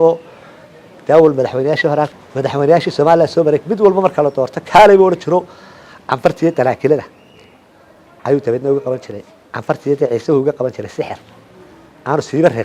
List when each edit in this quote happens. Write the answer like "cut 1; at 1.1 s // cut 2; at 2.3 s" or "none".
cut 1; at 2.1 s

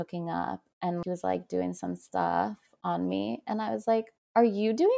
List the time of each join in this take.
cut 1; at 1.0 s

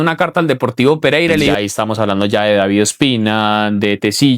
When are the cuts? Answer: cut 1; at 1.5 s

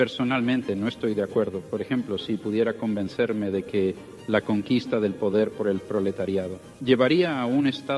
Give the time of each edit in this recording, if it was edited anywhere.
cut 1; at 6.6 s

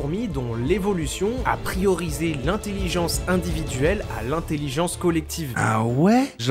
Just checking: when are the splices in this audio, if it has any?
cut 1; at 5.6 s

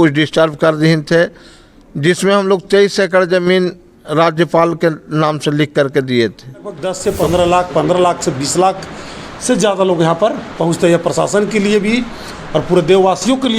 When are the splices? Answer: cut 1; at 6.9 s

